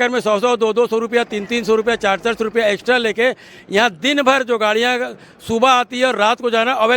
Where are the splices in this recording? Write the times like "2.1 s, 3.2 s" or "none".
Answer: none